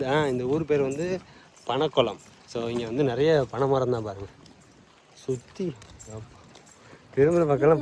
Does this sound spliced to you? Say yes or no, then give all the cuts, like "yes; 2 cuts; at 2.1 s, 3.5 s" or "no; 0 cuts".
no; 0 cuts